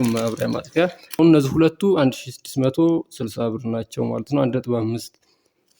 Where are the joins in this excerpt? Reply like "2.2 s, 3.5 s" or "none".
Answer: 1.2 s